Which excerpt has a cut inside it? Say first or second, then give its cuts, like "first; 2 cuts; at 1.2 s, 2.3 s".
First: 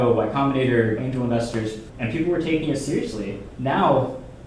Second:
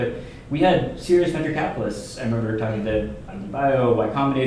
first; 2 cuts; at 2.0 s, 3.5 s